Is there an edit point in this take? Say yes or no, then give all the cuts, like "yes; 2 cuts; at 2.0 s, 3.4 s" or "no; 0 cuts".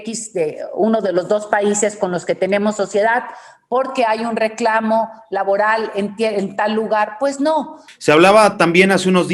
yes; 1 cut; at 7.8 s